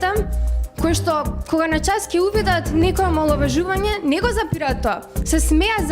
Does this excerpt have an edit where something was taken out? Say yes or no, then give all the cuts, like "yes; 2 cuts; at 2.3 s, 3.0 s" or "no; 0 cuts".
no; 0 cuts